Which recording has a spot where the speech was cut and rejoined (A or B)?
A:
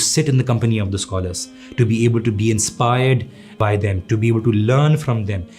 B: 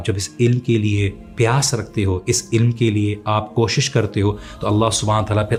A